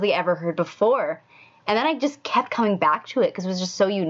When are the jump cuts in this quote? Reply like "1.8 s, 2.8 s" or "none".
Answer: none